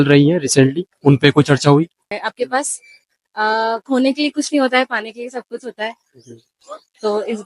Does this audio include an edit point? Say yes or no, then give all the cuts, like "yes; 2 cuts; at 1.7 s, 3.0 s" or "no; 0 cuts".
yes; 1 cut; at 2.1 s